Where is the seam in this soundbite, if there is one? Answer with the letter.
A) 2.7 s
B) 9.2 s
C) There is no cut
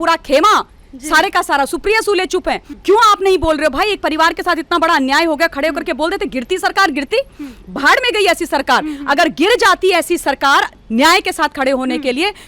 A